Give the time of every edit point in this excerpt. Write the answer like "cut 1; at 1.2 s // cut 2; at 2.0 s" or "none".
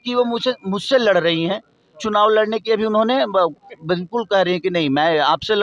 none